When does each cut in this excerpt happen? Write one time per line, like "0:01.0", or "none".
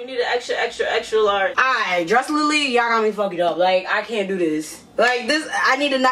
none